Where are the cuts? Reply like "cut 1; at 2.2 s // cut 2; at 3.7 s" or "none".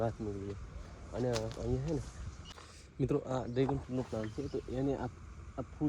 cut 1; at 2.5 s

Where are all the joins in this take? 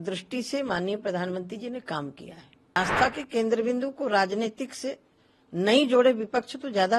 cut 1; at 2.8 s

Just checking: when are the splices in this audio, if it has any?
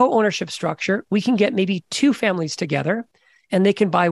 none

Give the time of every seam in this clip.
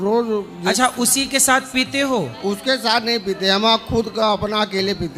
none

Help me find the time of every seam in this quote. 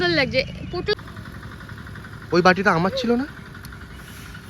cut 1; at 1.0 s

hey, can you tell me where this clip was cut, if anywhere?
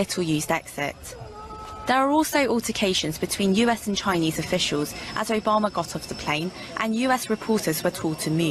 cut 1; at 6.2 s

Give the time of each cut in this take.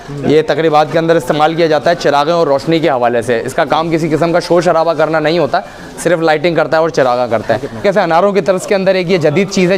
cut 1; at 7.8 s

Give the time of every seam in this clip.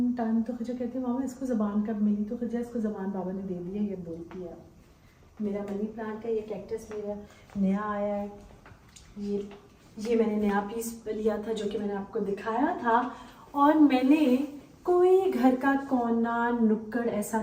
none

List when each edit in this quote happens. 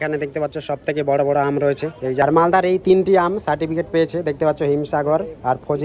cut 1; at 2.2 s

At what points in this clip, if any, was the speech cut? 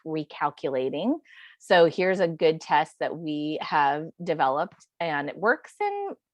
none

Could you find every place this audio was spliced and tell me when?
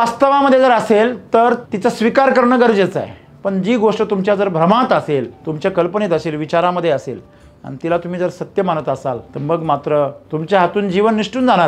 cut 1; at 1.7 s // cut 2; at 5.4 s // cut 3; at 9.3 s // cut 4; at 10.2 s

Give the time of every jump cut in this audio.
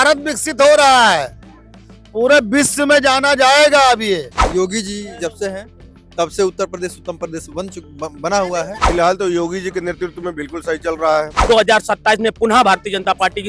cut 1; at 4.4 s // cut 2; at 8.8 s // cut 3; at 11.4 s

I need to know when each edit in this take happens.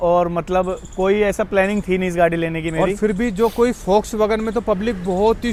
none

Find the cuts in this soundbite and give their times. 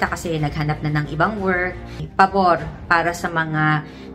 cut 1; at 2.0 s

